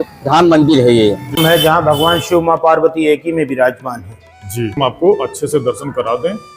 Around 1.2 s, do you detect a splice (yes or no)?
yes